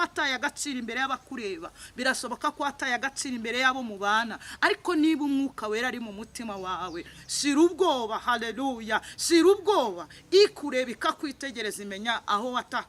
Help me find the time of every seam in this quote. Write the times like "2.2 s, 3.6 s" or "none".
none